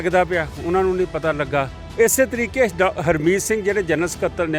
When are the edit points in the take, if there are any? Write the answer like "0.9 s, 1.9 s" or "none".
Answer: 1.8 s